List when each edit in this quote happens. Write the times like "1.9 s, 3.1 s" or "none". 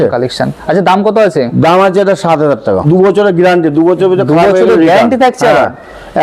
2.9 s